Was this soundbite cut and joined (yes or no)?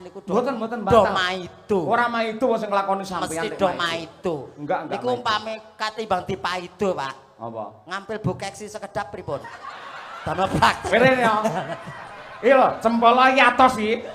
no